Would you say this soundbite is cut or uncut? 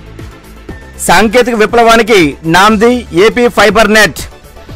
cut